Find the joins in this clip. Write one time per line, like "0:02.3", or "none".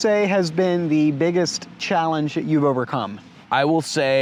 none